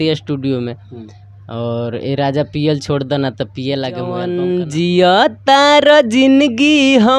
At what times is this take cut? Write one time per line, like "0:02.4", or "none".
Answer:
0:04.3